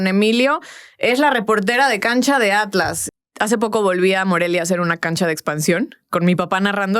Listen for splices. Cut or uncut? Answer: cut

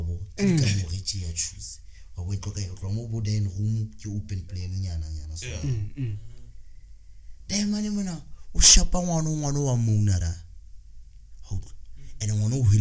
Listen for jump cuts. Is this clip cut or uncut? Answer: uncut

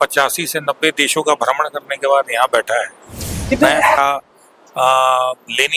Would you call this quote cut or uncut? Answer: cut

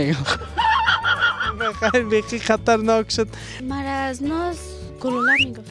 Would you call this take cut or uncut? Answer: cut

